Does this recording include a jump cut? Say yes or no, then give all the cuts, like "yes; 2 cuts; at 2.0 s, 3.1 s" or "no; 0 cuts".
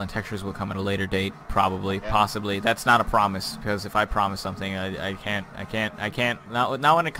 no; 0 cuts